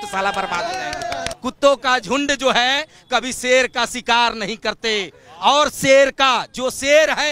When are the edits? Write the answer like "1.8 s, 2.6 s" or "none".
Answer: 1.3 s